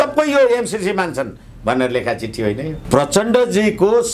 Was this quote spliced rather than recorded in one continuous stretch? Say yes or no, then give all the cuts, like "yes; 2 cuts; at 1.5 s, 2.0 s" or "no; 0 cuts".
yes; 1 cut; at 2.8 s